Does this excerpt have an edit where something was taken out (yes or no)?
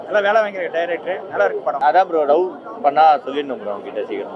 yes